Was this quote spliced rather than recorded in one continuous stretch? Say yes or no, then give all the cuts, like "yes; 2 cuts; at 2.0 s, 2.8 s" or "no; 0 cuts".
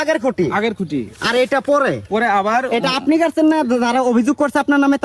no; 0 cuts